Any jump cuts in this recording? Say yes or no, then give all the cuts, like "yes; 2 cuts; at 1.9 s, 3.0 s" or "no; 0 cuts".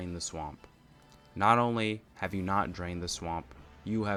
no; 0 cuts